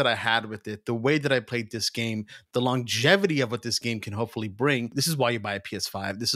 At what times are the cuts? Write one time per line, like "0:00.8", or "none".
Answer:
0:05.0